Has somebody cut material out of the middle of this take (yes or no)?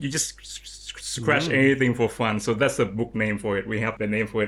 no